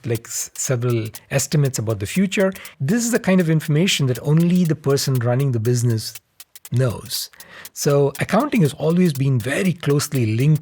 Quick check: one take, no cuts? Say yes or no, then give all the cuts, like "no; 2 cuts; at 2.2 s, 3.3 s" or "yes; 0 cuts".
no; 1 cut; at 2.7 s